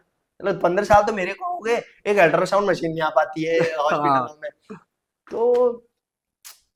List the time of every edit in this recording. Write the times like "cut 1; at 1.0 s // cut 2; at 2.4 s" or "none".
none